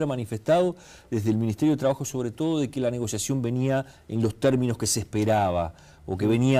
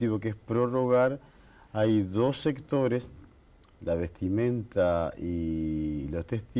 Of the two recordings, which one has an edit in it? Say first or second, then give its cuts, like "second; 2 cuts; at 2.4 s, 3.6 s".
second; 1 cut; at 2.4 s